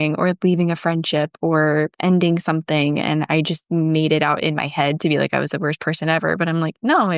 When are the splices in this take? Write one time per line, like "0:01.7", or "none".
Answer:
none